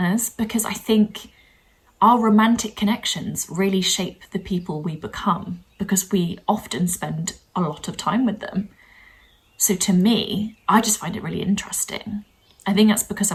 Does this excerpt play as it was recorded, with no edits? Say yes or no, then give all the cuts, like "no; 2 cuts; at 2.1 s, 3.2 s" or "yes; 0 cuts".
yes; 0 cuts